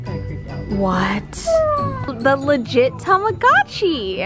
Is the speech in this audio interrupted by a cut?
yes; 1 cut; at 2.0 s

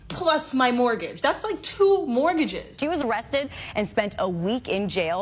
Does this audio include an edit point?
yes; 1 cut; at 2.7 s

